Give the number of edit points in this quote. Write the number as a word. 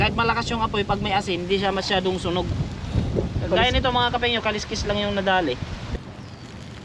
one